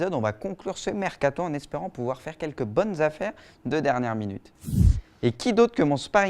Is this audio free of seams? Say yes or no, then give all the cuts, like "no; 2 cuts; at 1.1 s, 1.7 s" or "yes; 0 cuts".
no; 1 cut; at 2.4 s